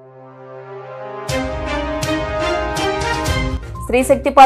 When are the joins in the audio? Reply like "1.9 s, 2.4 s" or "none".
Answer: 3.5 s